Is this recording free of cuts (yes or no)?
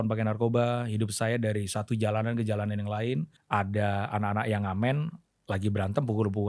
no